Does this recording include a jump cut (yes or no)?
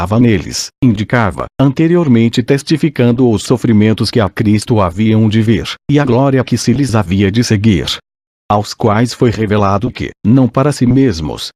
no